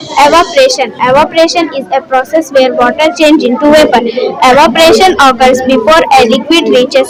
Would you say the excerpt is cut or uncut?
uncut